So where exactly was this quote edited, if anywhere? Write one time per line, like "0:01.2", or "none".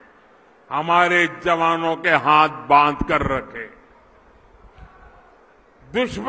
none